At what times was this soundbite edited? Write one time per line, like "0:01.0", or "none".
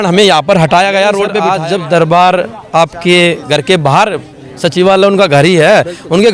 0:01.4